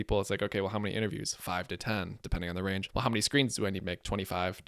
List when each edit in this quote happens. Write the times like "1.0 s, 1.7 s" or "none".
2.9 s